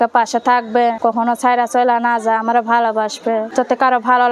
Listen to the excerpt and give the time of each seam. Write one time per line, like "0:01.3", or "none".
0:01.0
0:03.5